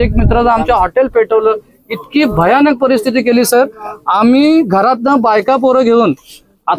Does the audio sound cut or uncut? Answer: uncut